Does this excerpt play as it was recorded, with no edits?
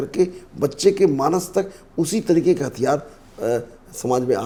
yes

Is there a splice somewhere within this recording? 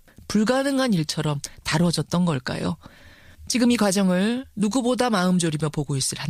no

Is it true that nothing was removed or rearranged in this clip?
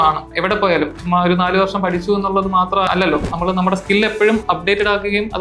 no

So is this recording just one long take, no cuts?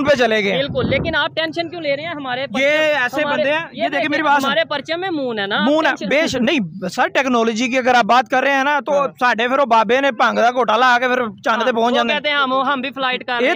yes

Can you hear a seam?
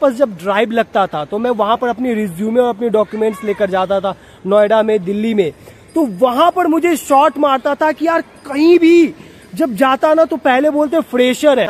no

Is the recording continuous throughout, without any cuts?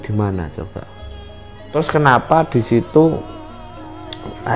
no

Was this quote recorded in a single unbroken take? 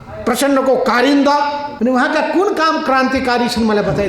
no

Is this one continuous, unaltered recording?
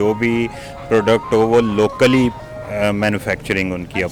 yes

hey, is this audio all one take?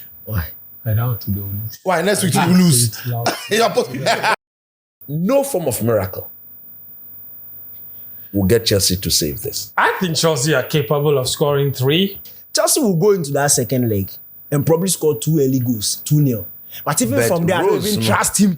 no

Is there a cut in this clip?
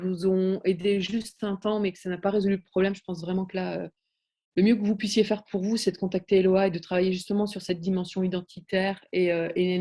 no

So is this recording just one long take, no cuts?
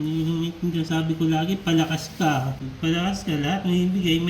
no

